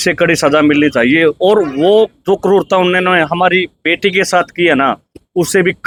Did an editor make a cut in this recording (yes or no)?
no